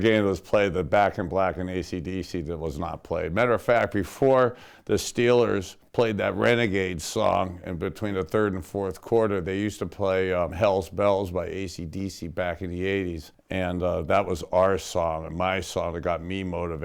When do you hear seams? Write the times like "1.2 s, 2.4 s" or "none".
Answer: 10.5 s, 13.3 s